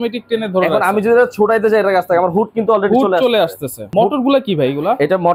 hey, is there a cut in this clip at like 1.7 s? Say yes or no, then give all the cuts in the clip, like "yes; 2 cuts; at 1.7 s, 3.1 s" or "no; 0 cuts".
no; 1 cut; at 3.9 s